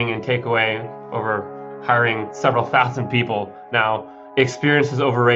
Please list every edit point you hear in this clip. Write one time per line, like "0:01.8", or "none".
0:04.2